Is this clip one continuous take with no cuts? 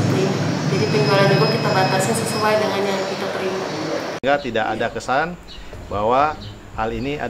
no; 1 cut; at 4.2 s

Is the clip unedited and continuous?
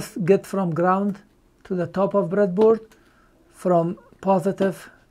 yes; 0 cuts

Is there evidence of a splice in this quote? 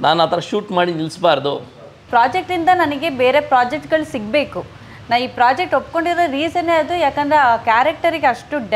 yes; 1 cut; at 2.0 s

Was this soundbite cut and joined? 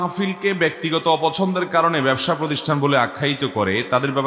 no; 0 cuts

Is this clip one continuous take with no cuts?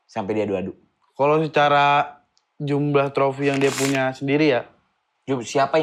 yes; 0 cuts

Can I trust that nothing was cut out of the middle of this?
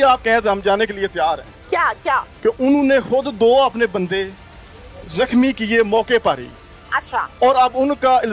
yes; 0 cuts

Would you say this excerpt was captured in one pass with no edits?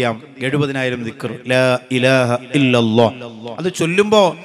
yes; 0 cuts

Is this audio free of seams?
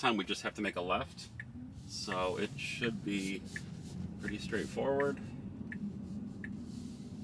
yes; 0 cuts

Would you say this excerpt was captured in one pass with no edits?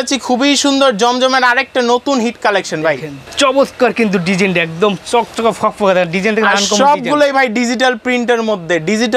yes; 0 cuts

